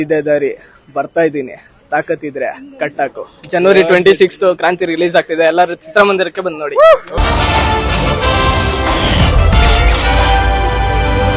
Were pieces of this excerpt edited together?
no; 0 cuts

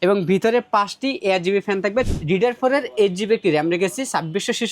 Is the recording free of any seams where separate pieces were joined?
no; 1 cut; at 2.1 s

